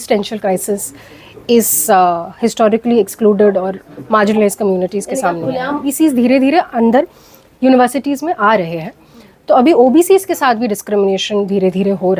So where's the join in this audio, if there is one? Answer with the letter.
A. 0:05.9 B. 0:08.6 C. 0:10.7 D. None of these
A